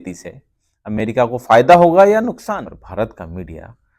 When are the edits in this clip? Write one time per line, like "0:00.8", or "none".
0:02.7